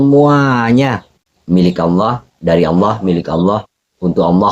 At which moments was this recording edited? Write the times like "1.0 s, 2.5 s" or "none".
1.3 s